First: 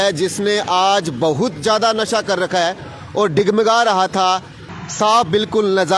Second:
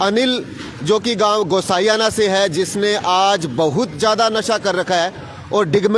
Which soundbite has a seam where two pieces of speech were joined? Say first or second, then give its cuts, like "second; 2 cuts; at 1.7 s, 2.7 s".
first; 1 cut; at 4.6 s